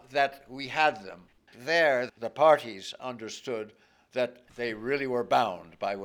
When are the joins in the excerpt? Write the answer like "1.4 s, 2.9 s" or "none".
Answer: 1.5 s, 4.4 s